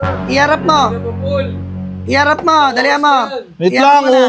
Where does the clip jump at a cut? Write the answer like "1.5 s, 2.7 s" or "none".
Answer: none